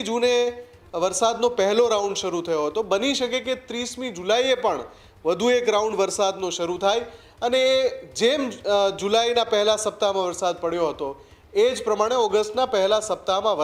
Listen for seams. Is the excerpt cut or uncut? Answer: uncut